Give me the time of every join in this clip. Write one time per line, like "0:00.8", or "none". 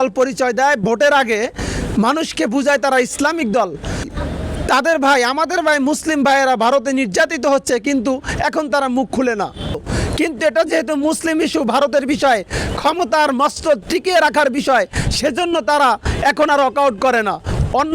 0:09.8